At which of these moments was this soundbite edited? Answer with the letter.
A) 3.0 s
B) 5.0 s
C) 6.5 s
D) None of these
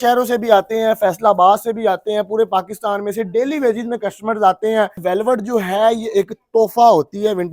B